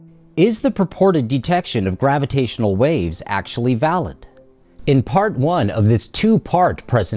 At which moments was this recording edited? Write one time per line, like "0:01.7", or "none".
0:01.7